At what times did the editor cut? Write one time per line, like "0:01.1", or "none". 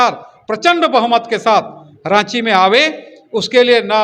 none